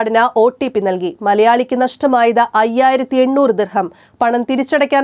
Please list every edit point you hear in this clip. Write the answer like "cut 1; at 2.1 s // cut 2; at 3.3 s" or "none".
none